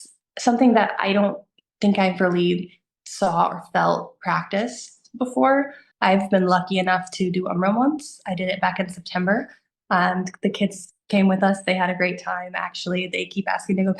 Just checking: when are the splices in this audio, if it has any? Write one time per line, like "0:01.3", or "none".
0:05.8